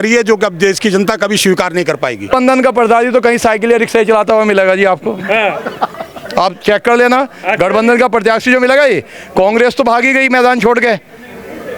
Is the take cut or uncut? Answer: cut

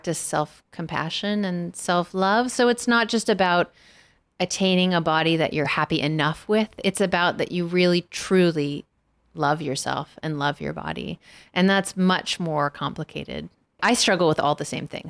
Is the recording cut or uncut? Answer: cut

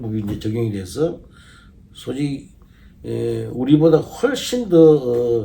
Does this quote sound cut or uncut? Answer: uncut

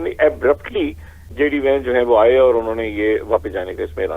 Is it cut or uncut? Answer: cut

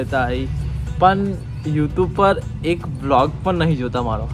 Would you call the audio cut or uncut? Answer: uncut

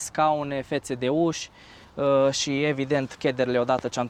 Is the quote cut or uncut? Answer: uncut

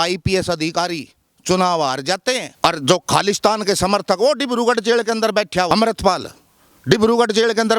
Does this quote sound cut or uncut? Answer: cut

